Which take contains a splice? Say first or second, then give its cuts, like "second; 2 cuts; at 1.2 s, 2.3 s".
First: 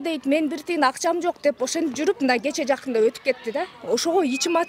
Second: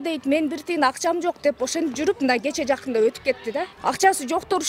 second; 1 cut; at 3.7 s